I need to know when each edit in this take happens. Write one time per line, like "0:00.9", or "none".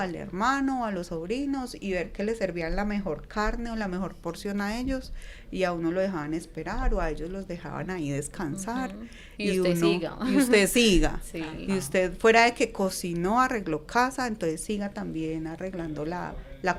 none

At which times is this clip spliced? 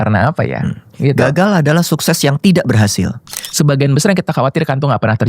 0:03.4

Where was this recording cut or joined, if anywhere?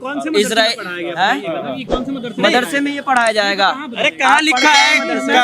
none

